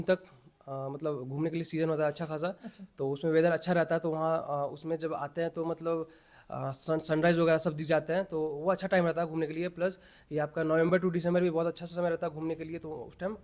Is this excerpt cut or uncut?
uncut